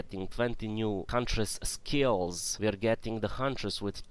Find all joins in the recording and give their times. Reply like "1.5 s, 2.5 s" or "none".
1.1 s, 2.4 s